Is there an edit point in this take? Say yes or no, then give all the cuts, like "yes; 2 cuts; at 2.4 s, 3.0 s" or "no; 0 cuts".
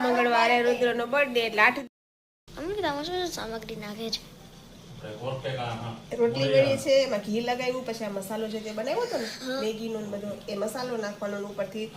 yes; 1 cut; at 1.8 s